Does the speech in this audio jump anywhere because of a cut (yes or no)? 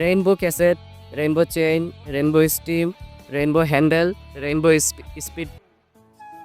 yes